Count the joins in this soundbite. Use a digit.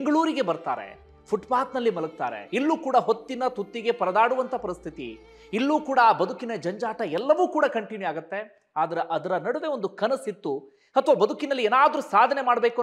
0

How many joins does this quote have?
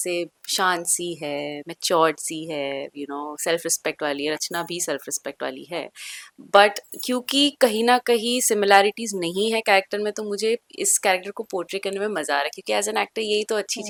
0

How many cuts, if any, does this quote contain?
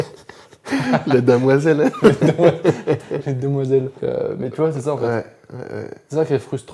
0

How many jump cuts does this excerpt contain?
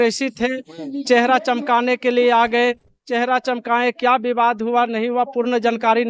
0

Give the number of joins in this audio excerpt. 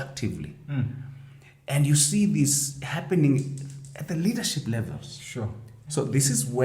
1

